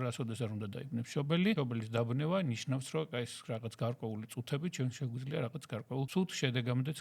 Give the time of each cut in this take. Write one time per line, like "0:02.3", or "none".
0:01.6
0:06.1